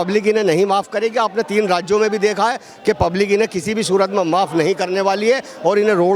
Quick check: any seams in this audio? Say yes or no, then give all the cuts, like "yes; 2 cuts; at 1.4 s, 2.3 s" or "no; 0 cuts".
no; 0 cuts